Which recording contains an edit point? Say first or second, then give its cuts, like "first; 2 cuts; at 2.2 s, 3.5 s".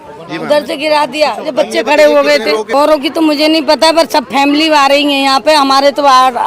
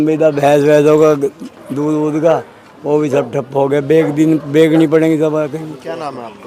first; 1 cut; at 2.7 s